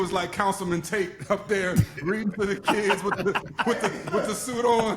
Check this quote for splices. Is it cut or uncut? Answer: uncut